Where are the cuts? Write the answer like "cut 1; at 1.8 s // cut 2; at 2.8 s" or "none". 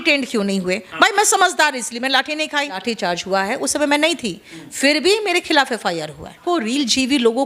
cut 1; at 2.8 s // cut 2; at 6.4 s